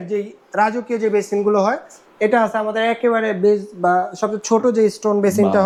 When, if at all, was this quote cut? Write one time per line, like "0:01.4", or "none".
none